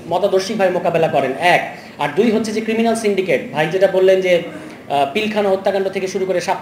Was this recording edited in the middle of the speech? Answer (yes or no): no